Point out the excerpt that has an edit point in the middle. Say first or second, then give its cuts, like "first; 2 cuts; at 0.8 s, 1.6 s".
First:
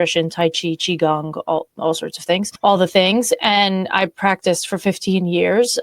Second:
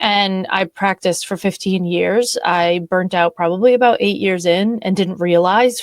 first; 1 cut; at 2.5 s